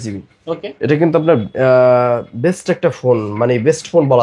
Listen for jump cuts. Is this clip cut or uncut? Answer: uncut